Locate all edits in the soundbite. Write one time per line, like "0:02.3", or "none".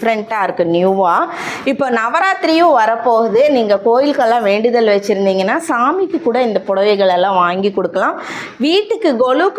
none